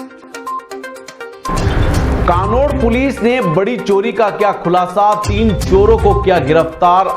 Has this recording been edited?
yes; 1 cut; at 1.2 s

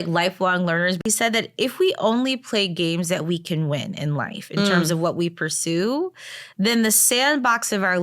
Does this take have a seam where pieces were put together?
yes; 1 cut; at 1.0 s

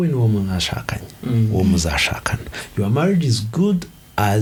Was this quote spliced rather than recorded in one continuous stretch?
no; 0 cuts

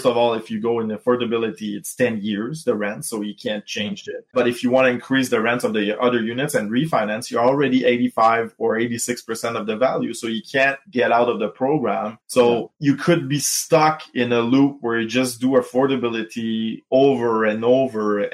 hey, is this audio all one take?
yes; 0 cuts

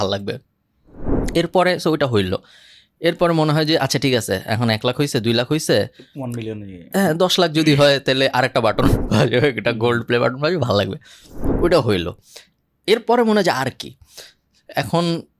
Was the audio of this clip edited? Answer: no; 0 cuts

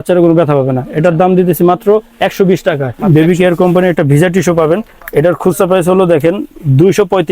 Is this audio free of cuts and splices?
no; 1 cut; at 3.1 s

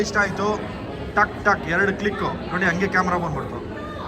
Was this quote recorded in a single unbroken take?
no; 1 cut; at 0.9 s

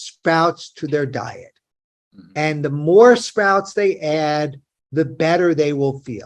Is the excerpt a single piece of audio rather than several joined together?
yes; 0 cuts

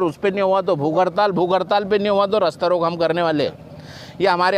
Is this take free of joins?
yes; 0 cuts

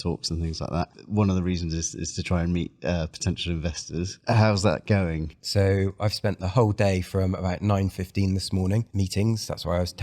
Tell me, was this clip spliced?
yes; 4 cuts; at 1.0 s, 4.1 s, 5.3 s, 8.9 s

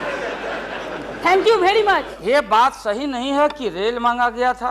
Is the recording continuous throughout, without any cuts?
no; 1 cut; at 2.1 s

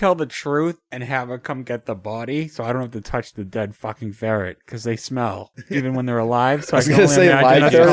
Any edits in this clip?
yes; 2 cuts; at 0.9 s, 5.5 s

